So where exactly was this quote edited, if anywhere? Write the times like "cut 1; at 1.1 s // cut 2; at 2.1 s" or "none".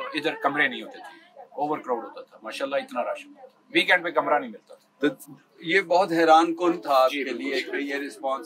none